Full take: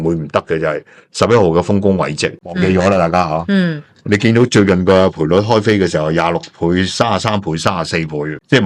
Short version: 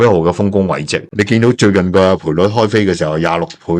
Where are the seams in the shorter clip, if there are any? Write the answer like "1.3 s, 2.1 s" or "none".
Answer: 1.0 s

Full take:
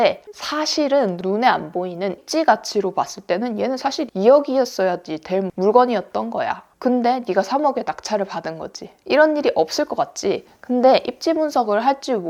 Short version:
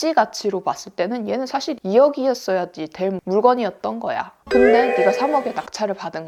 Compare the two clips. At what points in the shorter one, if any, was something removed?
none

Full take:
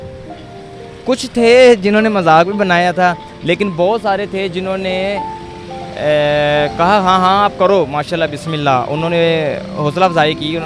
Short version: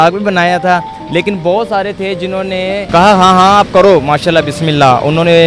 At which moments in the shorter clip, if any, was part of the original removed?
2.9 s

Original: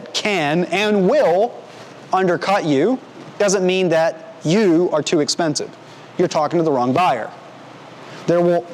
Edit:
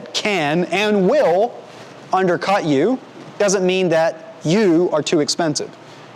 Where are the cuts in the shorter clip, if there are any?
none

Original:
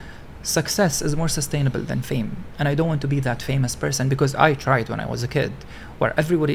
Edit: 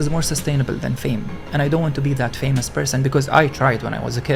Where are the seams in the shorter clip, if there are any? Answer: none

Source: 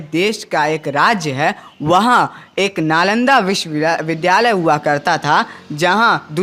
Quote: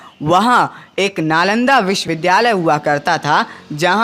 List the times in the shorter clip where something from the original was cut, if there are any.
2.1 s

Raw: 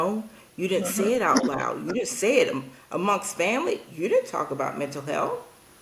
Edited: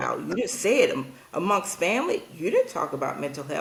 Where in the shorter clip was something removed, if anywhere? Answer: none

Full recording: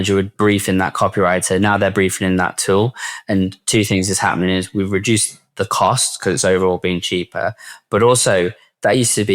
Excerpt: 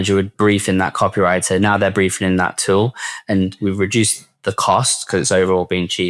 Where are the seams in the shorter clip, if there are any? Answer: 3.6 s

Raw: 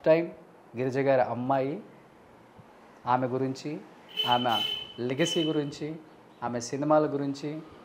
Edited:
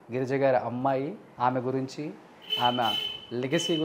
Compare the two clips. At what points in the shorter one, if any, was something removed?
1.2 s

